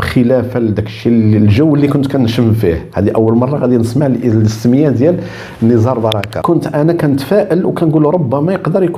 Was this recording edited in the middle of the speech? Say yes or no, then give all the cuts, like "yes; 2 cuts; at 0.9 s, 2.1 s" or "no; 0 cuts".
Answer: yes; 1 cut; at 6.3 s